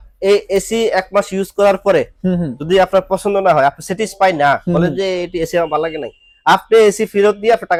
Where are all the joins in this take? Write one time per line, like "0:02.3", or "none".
none